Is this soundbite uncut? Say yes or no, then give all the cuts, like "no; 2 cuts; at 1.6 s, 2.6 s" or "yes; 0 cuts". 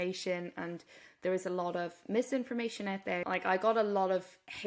no; 1 cut; at 3.2 s